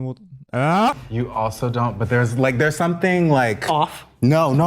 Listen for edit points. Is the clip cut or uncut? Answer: cut